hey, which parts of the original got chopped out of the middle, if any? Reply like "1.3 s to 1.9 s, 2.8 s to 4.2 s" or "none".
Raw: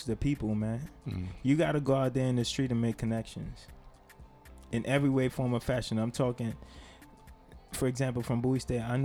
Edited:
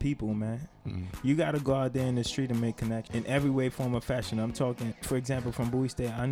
3.3 s to 4.6 s, 6.6 s to 7.7 s